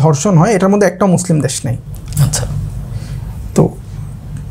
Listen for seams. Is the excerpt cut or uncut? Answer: uncut